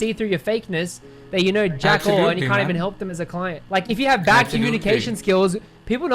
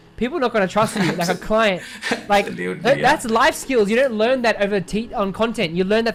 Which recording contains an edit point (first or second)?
first